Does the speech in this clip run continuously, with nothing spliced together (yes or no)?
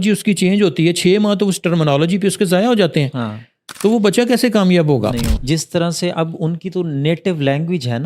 no